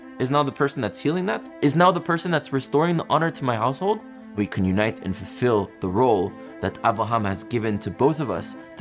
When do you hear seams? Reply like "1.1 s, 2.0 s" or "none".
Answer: 4.4 s

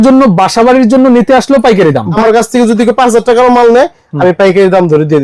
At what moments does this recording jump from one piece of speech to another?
2.2 s

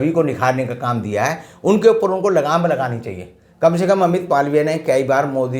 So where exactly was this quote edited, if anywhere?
none

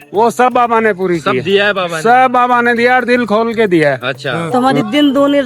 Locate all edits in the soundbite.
4.3 s

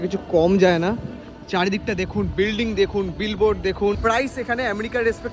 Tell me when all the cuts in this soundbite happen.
4.0 s

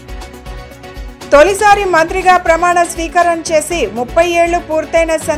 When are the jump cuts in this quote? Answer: 1.2 s

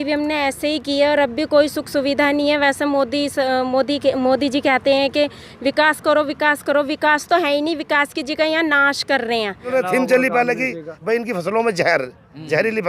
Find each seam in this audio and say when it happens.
9.7 s

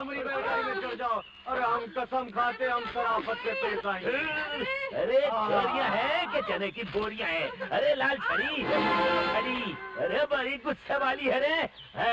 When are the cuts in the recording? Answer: none

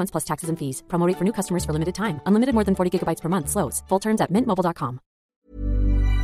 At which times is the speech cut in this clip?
5.3 s

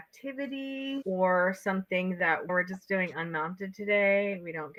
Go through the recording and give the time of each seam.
none

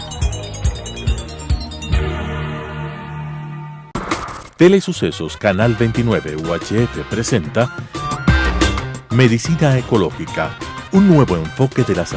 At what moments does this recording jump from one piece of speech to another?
none

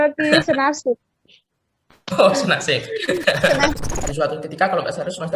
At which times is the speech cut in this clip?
3.9 s

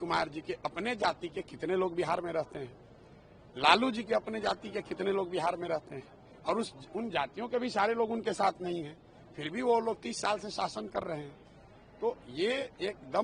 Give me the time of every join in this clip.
none

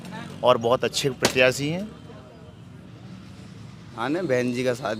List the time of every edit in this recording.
4.0 s

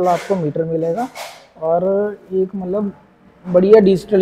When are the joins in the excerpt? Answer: none

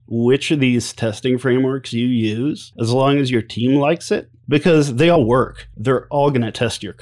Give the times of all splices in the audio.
2.7 s, 4.3 s, 5.2 s

